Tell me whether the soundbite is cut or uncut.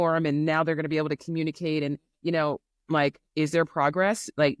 uncut